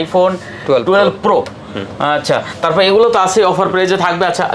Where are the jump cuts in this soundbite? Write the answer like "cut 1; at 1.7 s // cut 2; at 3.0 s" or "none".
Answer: none